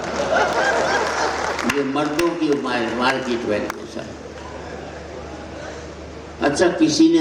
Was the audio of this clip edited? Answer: no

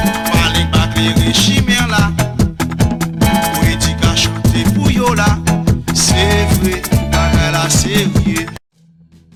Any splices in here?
no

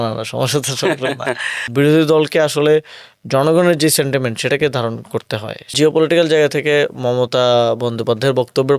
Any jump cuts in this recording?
yes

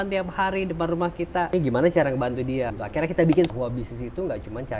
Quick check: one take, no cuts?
no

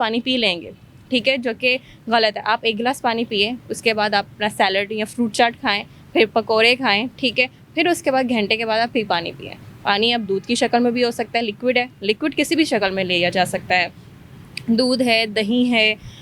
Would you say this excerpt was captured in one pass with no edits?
yes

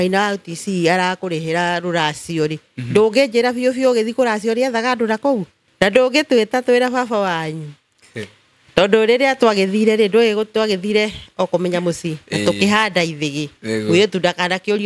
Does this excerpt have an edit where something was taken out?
yes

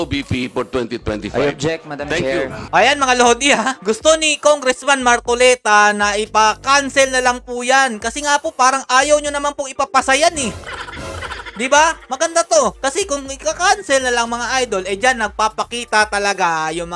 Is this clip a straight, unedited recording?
yes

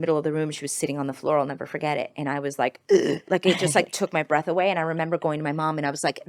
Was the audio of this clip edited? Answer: no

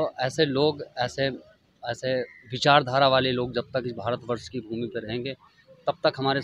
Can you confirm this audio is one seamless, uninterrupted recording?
yes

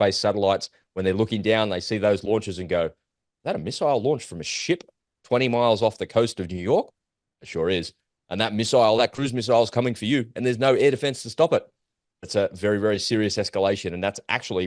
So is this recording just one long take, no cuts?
yes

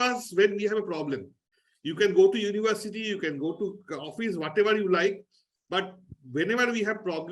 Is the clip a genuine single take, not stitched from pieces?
yes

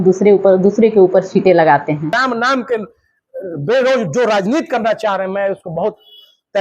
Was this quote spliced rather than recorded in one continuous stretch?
yes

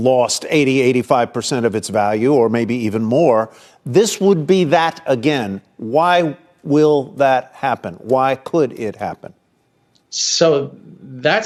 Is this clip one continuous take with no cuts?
yes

